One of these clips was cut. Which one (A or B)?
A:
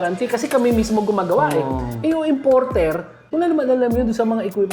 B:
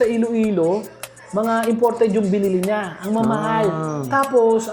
A